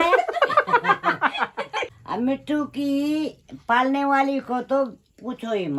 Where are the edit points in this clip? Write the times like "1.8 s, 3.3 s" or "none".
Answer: 1.9 s